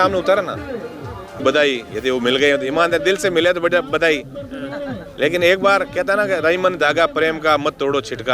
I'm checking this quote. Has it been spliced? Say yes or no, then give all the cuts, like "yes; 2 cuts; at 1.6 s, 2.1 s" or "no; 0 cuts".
yes; 1 cut; at 1.4 s